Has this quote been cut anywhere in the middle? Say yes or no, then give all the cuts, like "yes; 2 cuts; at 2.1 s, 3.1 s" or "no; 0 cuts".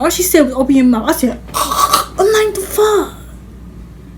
no; 0 cuts